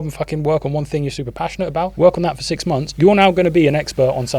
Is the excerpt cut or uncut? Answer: cut